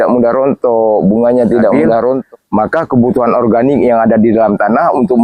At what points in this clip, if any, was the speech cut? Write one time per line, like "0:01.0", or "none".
0:02.2